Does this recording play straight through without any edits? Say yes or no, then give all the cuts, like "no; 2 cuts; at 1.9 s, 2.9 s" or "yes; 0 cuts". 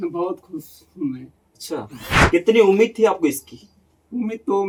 yes; 0 cuts